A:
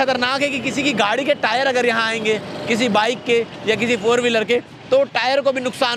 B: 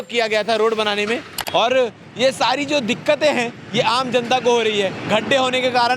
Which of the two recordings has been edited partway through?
B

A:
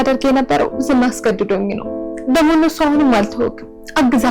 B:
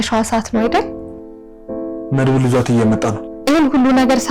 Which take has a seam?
B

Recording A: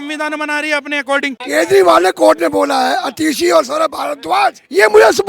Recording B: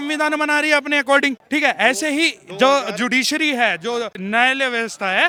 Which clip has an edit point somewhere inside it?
A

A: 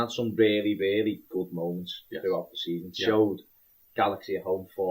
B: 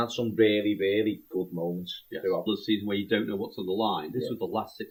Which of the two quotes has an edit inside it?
A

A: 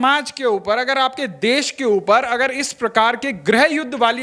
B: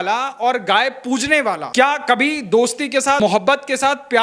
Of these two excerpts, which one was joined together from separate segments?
B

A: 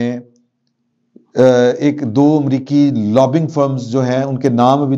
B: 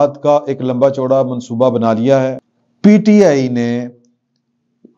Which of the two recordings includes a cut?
B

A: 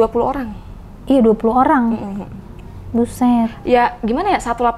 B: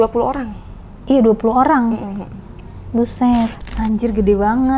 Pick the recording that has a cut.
B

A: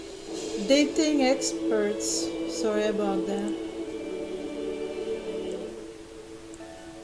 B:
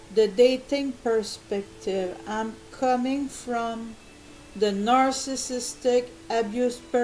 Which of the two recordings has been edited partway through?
B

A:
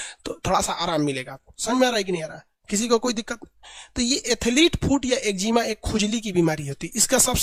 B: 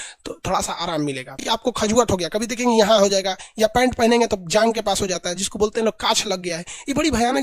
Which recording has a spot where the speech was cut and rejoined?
B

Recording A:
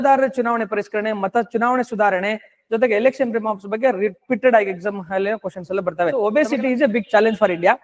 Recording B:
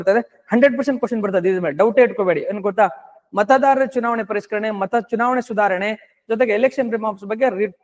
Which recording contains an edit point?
A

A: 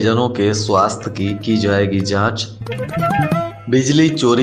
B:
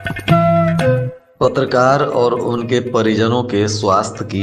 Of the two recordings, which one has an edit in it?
B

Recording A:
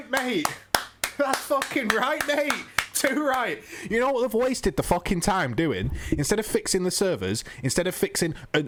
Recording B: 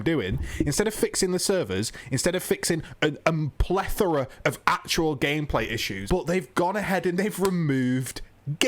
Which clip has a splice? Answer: B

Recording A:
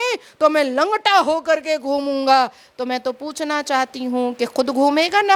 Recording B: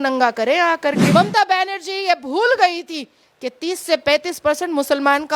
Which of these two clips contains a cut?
B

